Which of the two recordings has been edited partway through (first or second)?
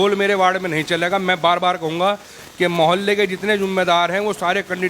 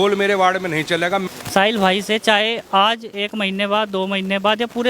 second